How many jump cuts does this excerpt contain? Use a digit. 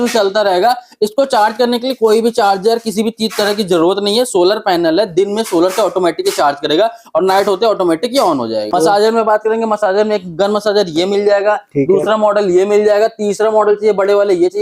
1